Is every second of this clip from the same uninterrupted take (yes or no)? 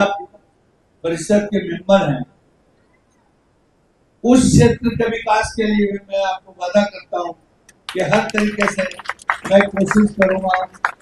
yes